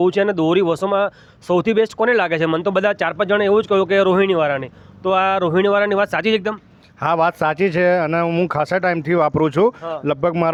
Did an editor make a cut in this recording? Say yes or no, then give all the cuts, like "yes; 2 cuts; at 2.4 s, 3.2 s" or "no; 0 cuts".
no; 0 cuts